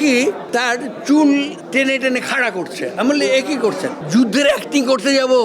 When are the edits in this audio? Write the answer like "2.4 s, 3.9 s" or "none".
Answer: 4.0 s